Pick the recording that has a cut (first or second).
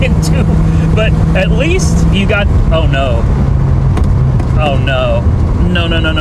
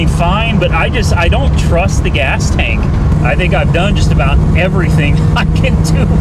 second